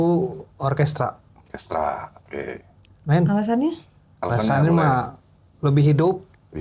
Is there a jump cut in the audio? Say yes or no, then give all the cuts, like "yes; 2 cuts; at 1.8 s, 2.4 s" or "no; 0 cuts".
no; 0 cuts